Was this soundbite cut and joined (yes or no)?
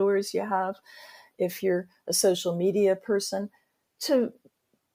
no